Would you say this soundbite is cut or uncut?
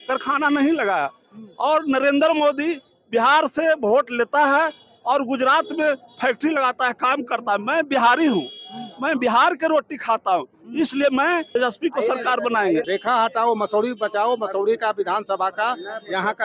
cut